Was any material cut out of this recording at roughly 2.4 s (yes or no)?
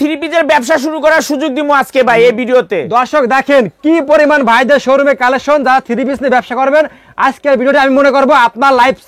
no